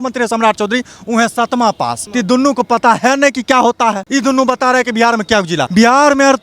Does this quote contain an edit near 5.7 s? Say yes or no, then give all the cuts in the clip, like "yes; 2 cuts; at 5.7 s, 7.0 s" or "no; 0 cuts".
yes; 3 cuts; at 2.0 s, 4.0 s, 5.7 s